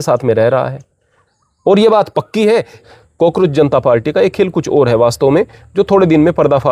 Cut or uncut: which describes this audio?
cut